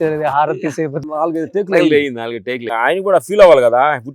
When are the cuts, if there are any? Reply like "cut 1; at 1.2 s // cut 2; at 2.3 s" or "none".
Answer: cut 1; at 1.0 s // cut 2; at 2.7 s